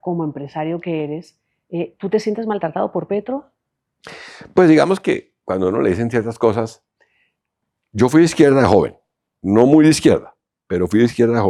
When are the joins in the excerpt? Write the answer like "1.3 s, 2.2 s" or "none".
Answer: none